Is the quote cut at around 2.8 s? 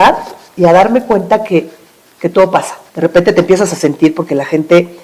yes; 1 cut; at 2.8 s

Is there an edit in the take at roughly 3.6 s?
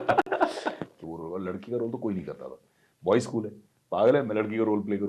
no; 1 cut; at 1.0 s

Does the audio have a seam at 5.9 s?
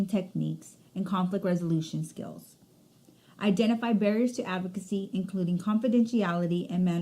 no; 1 cut; at 1.7 s

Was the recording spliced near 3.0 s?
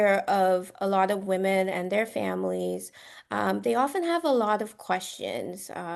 no; 0 cuts

